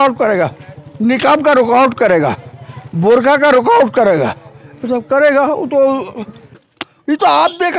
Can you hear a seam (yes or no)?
yes